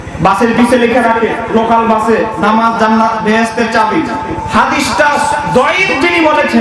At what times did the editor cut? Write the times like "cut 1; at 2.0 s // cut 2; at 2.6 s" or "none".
cut 1; at 4.4 s

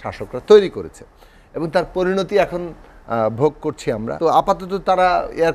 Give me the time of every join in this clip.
cut 1; at 4.1 s

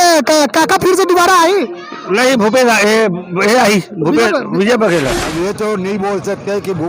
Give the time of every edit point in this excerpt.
cut 1; at 5.3 s

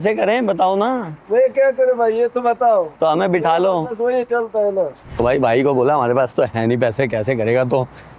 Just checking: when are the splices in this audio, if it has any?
none

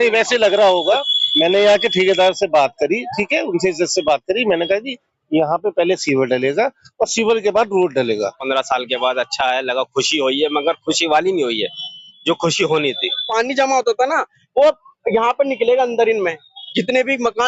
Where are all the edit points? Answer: cut 1; at 8.4 s // cut 2; at 13.3 s

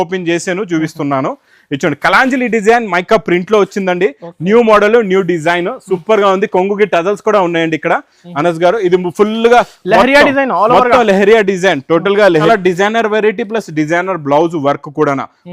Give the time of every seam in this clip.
cut 1; at 12.5 s

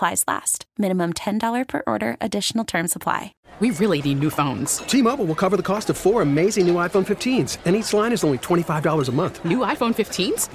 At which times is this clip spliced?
cut 1; at 3.4 s

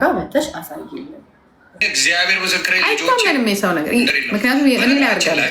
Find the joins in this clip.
cut 1; at 1.8 s // cut 2; at 4.1 s

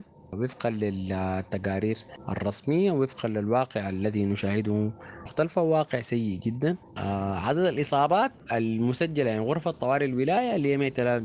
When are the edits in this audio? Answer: cut 1; at 2.1 s // cut 2; at 5.3 s // cut 3; at 6.9 s

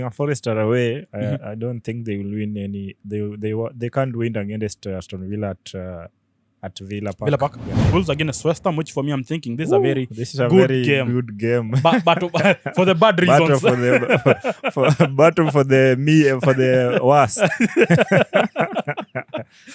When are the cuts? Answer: cut 1; at 7.9 s

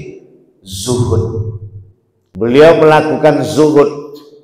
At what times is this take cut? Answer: cut 1; at 2.5 s

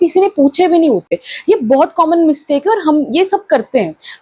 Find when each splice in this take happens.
none

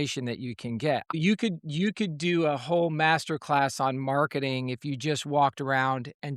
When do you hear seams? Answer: cut 1; at 1.1 s

